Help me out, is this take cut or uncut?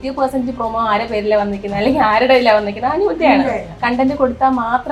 uncut